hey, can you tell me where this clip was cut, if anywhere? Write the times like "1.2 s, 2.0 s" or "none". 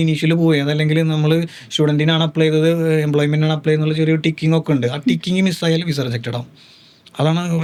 none